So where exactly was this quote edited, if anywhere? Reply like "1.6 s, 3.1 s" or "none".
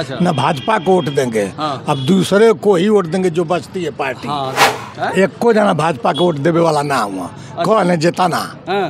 4.6 s